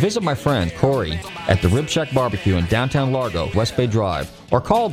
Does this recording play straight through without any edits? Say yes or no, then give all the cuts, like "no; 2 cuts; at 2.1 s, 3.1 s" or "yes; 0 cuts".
no; 2 cuts; at 0.9 s, 3.5 s